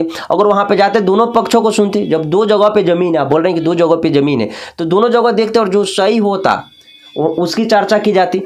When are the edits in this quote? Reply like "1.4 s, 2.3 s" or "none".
none